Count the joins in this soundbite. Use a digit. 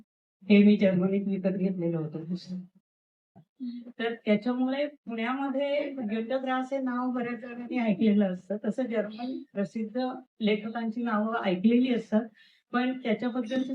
1